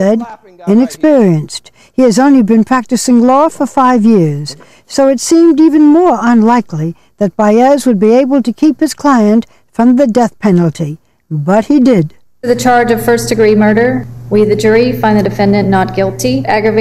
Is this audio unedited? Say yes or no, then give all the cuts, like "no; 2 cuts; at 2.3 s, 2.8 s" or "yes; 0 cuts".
no; 1 cut; at 12.5 s